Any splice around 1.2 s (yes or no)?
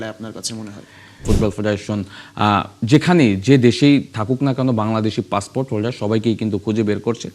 yes